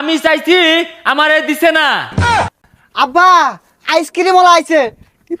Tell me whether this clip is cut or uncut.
cut